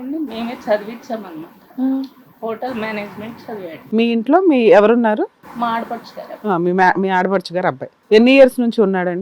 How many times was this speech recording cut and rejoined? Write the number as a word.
three